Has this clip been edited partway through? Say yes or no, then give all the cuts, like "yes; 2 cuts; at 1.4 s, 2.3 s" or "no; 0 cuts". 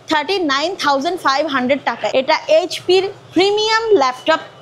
yes; 1 cut; at 2.1 s